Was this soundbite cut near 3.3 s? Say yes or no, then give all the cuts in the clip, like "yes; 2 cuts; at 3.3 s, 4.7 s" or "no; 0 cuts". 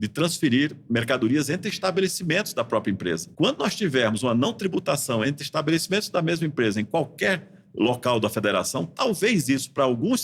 yes; 1 cut; at 3.3 s